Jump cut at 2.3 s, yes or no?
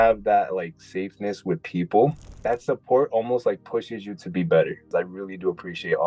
yes